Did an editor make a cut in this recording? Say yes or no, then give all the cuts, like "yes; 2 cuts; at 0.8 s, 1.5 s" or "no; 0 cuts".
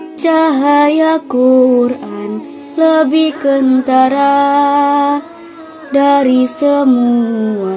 no; 0 cuts